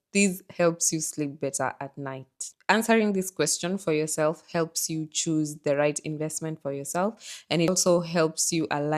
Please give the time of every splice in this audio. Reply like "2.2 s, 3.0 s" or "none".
2.5 s, 7.7 s